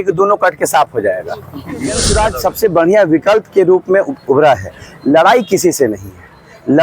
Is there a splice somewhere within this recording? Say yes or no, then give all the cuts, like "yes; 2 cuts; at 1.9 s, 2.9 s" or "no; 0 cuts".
yes; 1 cut; at 2.1 s